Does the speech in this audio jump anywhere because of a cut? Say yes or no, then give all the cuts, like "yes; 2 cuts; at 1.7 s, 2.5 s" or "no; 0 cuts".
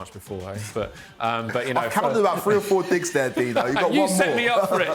no; 0 cuts